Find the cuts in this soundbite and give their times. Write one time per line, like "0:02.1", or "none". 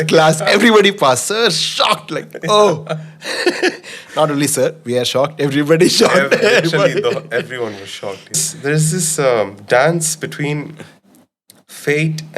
0:08.5